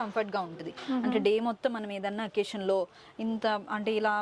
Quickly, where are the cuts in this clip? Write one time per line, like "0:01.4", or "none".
none